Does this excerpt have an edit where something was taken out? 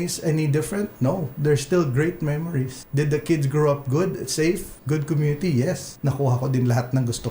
yes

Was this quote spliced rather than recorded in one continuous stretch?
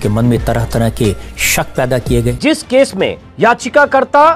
yes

